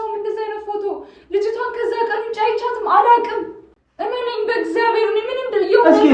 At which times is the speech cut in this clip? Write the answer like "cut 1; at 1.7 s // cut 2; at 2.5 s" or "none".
none